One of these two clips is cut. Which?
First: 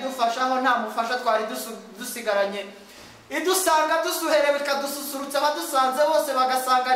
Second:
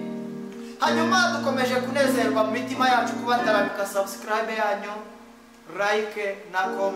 second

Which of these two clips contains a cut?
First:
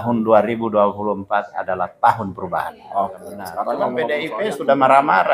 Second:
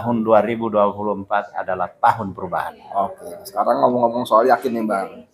first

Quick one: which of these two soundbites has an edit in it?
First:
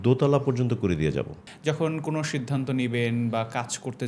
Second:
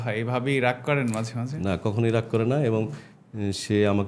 first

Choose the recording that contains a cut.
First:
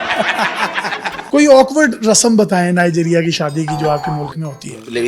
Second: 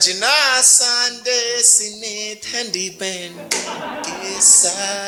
first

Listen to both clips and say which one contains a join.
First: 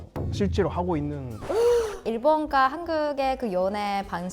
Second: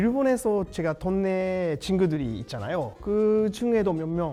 first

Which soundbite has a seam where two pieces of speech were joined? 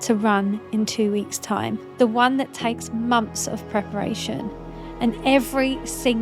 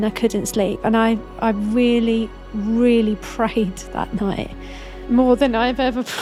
first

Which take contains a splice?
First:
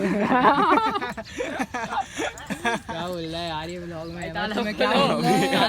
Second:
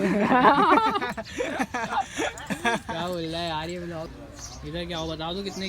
second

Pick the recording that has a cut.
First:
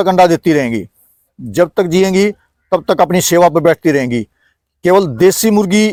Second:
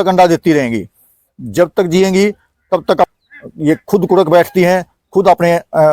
second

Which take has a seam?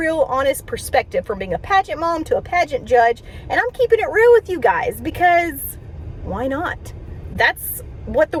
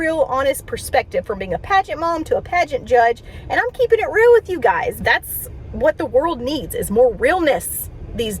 second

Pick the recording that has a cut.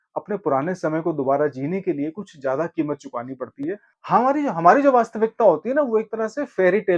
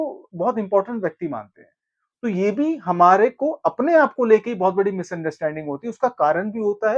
first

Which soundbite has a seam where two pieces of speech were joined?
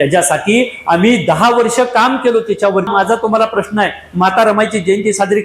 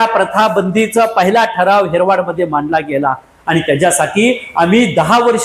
first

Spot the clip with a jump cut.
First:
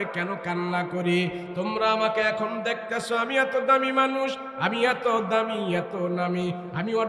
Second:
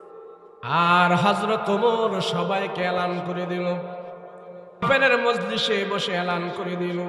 second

